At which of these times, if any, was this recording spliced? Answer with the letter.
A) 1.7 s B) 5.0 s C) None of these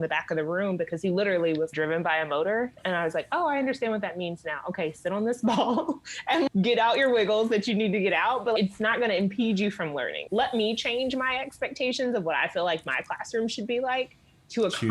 A